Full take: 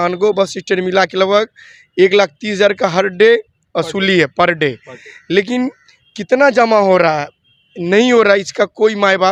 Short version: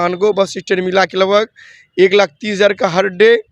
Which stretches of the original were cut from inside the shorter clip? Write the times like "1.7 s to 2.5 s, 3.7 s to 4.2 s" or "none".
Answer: none